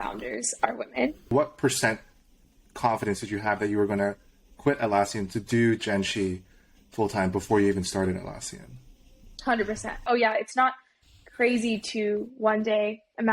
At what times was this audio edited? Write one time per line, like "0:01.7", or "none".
0:01.3
0:10.0